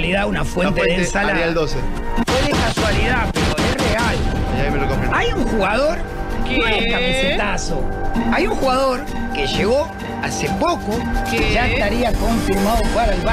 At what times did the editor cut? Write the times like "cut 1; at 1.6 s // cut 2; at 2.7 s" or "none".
none